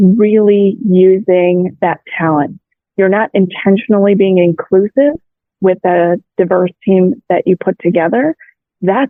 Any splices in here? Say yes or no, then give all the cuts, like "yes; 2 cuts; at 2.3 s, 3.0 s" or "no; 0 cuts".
no; 0 cuts